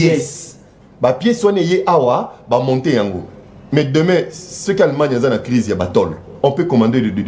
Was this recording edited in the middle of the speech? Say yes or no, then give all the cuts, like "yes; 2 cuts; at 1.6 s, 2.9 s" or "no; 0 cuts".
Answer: no; 0 cuts